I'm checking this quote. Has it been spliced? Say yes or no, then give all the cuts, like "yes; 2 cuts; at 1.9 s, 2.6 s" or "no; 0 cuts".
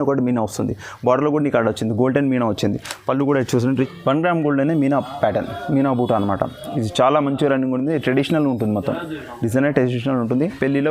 yes; 1 cut; at 3.7 s